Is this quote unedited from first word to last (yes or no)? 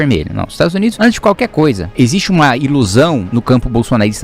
no